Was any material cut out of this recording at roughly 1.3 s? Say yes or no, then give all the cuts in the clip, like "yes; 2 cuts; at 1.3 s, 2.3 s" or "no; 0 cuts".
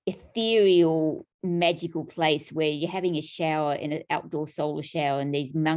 yes; 1 cut; at 1.3 s